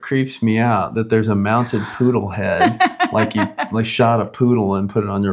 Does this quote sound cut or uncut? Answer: uncut